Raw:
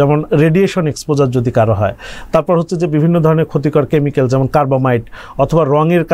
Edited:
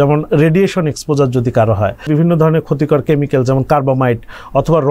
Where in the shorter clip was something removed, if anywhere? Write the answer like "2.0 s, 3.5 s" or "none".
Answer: 2.1 s